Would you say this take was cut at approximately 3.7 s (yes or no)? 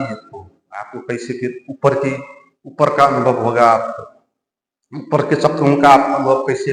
no